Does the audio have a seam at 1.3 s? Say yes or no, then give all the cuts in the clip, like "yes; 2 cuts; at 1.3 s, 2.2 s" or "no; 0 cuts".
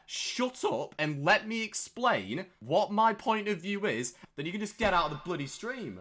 no; 2 cuts; at 2.6 s, 4.2 s